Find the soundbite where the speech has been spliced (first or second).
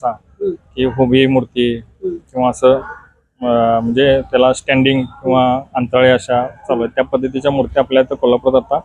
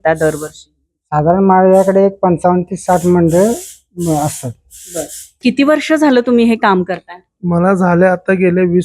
second